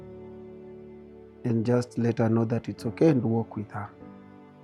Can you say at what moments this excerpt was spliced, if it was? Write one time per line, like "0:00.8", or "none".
0:01.4
0:03.9